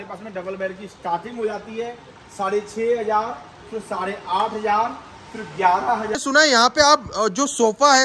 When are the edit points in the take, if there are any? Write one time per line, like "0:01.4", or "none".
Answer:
0:06.2